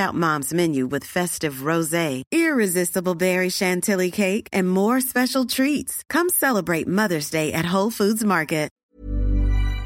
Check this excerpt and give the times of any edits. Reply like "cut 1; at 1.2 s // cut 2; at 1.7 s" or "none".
cut 1; at 8.8 s